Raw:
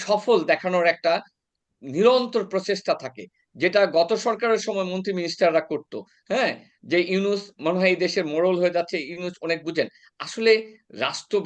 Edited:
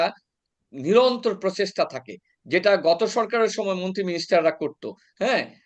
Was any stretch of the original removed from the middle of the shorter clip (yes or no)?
no